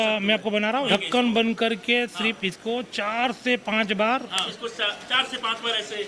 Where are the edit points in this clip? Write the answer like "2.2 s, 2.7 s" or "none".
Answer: 0.9 s, 4.5 s